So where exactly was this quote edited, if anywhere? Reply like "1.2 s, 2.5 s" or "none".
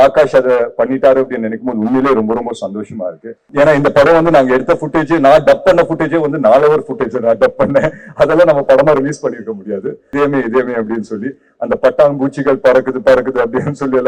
3.4 s, 10.1 s